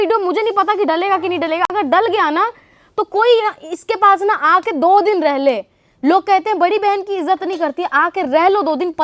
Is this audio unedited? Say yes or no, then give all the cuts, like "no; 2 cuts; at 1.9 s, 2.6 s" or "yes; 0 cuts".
yes; 0 cuts